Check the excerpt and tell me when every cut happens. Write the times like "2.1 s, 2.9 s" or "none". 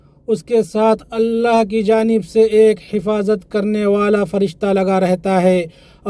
none